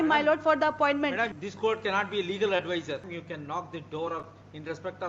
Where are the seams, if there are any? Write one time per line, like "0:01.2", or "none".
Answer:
0:01.3
0:03.0